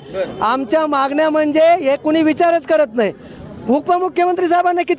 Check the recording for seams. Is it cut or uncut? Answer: uncut